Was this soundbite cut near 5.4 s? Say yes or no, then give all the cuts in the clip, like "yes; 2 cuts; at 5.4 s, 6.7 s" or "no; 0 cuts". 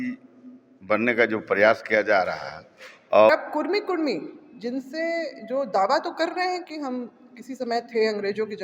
no; 1 cut; at 3.3 s